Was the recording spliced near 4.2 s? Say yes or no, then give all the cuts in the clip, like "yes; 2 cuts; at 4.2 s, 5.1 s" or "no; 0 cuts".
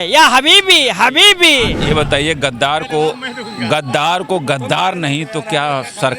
no; 1 cut; at 1.8 s